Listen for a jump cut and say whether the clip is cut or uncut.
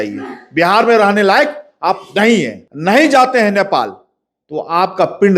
cut